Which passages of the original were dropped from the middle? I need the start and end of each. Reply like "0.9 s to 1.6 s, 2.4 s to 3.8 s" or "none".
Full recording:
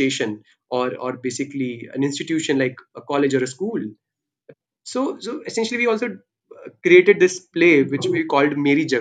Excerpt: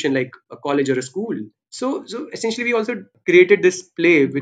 4.0 s to 4.7 s, 6.2 s to 6.7 s